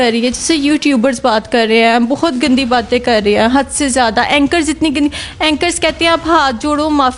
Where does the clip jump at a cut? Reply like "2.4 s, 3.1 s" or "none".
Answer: none